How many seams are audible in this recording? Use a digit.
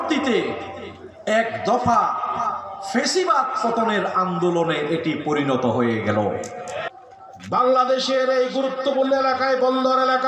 1